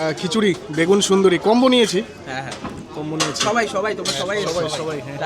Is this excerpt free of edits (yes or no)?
yes